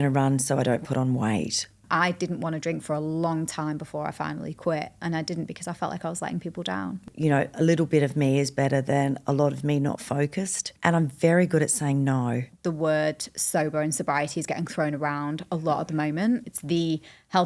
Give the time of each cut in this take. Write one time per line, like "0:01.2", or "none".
0:01.7
0:07.1
0:10.7
0:12.5
0:16.5